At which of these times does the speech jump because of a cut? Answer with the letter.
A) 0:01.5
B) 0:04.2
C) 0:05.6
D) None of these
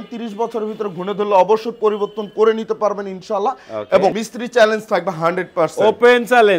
B